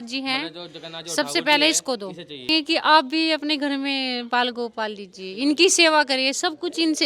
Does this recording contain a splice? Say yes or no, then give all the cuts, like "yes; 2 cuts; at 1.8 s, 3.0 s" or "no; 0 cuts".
yes; 1 cut; at 2.5 s